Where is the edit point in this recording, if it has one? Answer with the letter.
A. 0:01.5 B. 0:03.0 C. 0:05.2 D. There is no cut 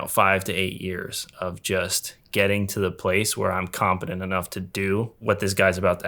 C